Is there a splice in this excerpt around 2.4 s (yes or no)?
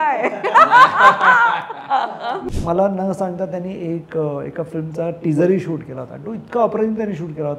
yes